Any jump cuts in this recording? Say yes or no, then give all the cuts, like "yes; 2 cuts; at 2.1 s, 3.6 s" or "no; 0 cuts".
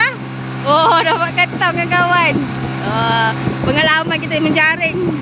no; 0 cuts